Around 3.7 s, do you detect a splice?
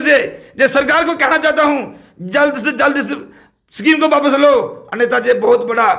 no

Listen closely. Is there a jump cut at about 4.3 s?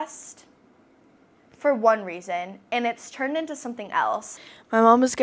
yes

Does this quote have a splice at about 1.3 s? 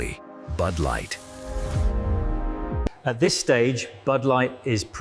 no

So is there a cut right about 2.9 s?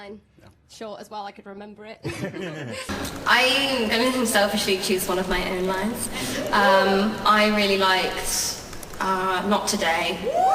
yes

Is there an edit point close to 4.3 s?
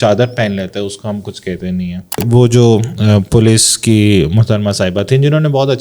no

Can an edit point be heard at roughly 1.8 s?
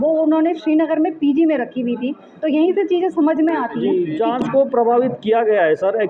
no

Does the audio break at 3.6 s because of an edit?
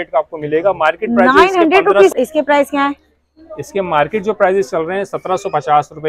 no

